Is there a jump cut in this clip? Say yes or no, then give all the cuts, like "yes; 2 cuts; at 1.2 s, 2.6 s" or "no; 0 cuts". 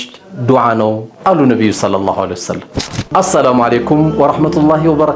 no; 0 cuts